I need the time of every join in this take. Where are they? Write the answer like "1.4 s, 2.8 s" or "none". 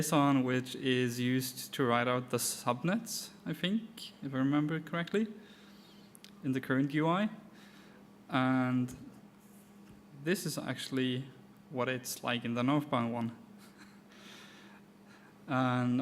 14.9 s